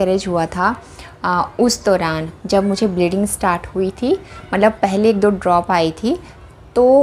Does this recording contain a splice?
no; 0 cuts

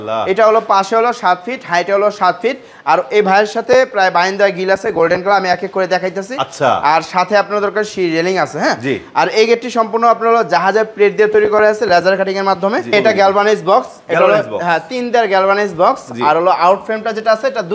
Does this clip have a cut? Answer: yes; 1 cut; at 12.9 s

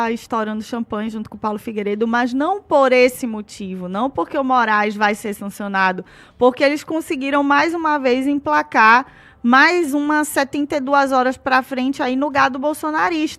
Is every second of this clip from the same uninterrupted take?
yes; 0 cuts

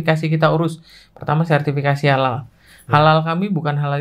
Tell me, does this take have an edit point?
no; 0 cuts

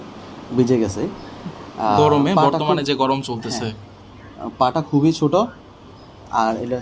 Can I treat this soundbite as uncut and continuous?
yes; 0 cuts

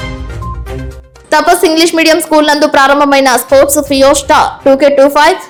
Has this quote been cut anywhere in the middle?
no; 0 cuts

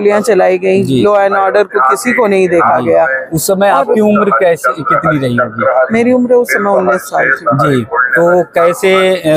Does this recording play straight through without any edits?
yes; 0 cuts

